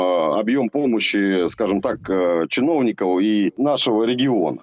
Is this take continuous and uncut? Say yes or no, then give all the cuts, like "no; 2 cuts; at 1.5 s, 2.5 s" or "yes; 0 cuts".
no; 1 cut; at 3.6 s